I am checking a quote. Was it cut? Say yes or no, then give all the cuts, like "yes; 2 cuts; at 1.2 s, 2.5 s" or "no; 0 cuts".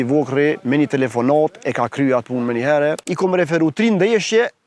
yes; 1 cut; at 3.1 s